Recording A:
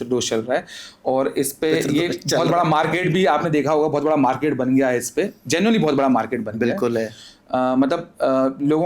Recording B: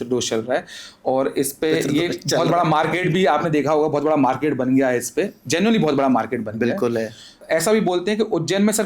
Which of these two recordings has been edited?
B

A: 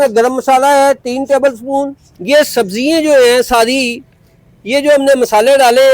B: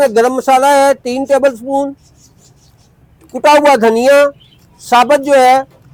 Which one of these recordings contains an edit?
A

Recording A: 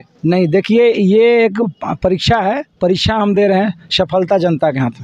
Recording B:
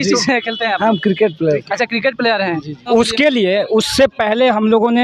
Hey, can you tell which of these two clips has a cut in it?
B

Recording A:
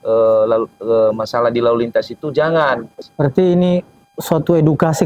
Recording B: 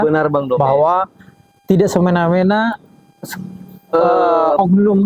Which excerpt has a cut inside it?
A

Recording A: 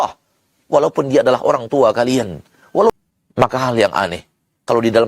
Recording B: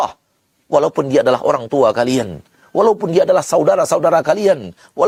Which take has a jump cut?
A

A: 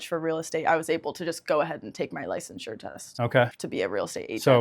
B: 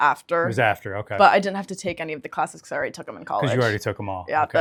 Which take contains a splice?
A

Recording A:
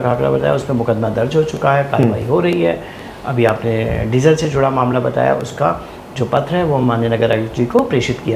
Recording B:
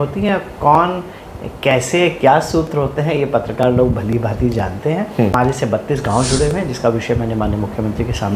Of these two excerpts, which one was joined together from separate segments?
B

